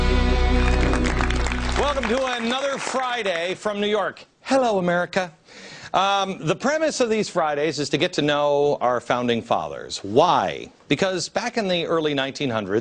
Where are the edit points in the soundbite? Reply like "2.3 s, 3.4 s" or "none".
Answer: none